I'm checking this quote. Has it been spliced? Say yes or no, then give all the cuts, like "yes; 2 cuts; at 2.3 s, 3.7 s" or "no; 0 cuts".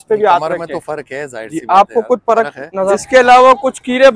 yes; 1 cut; at 2.9 s